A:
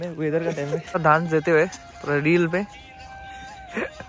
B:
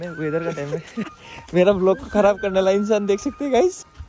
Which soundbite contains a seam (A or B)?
A